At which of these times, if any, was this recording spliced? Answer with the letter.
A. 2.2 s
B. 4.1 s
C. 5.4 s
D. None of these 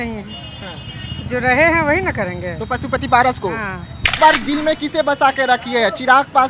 B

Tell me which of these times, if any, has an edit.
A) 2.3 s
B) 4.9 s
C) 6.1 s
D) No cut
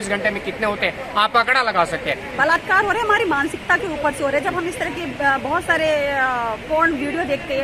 A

